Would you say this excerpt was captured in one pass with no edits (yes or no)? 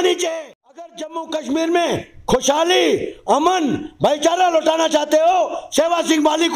no